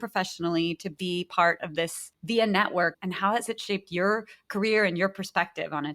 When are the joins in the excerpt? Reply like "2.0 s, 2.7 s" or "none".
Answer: 3.0 s